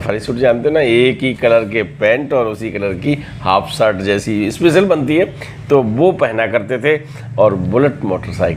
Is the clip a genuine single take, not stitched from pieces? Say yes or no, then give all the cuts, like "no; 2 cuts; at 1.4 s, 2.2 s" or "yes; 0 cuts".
yes; 0 cuts